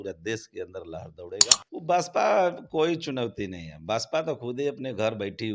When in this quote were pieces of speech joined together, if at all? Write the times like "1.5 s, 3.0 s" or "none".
1.6 s